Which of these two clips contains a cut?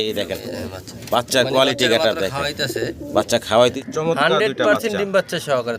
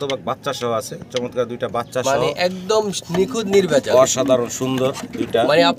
first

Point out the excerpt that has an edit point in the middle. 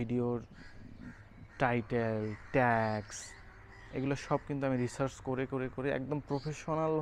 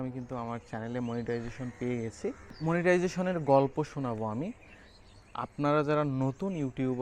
second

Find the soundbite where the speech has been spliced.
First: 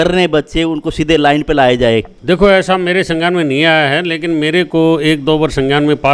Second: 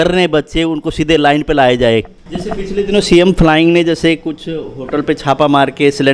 second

